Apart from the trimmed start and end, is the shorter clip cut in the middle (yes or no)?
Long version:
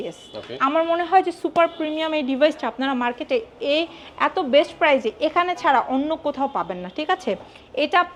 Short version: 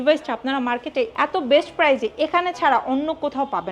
yes